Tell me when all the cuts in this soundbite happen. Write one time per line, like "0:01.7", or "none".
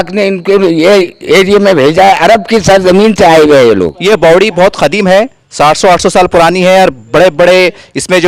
0:04.0